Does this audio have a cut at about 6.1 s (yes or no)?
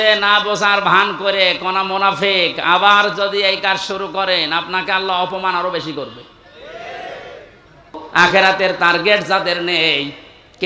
no